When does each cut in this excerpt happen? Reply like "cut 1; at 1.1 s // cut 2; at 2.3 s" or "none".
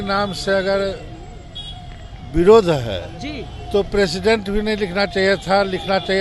none

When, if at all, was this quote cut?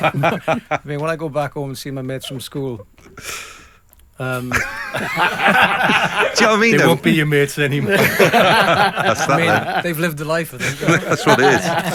none

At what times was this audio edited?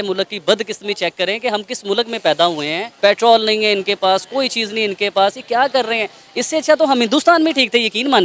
cut 1; at 2.8 s

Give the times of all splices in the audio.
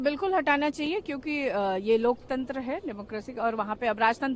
none

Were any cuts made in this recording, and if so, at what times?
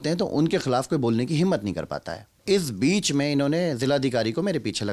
cut 1; at 2.4 s

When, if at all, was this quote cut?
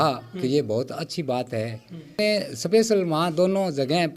cut 1; at 2.2 s

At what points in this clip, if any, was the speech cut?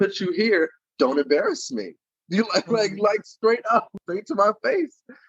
cut 1; at 3.9 s

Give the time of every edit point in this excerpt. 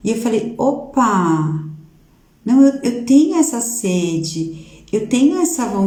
none

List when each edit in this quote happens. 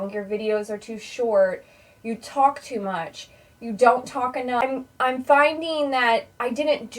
cut 1; at 4.6 s

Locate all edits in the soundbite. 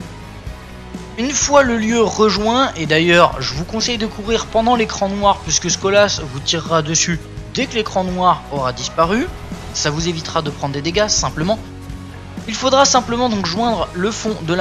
none

